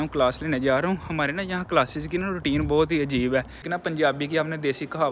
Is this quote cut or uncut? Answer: cut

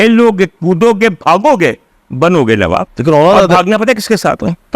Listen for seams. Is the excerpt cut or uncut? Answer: cut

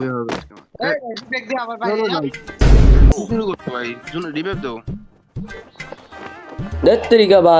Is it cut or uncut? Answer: uncut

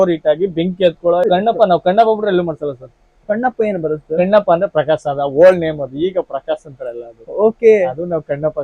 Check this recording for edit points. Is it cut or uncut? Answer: cut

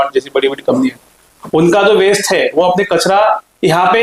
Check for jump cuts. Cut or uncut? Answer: uncut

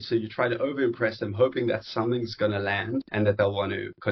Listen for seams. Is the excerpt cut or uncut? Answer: cut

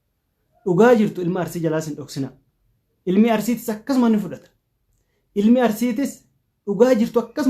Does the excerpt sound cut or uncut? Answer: uncut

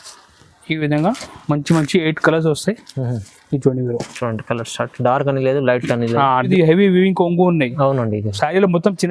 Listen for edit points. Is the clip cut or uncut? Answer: cut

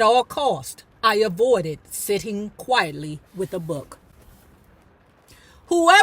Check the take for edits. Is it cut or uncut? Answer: cut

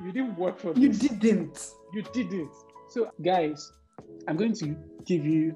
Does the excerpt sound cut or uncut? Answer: cut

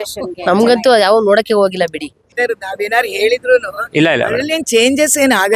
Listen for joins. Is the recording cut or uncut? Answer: uncut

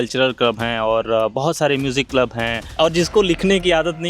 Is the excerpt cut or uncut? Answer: cut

